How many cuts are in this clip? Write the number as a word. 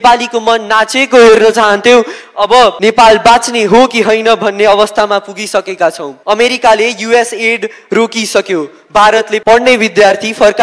three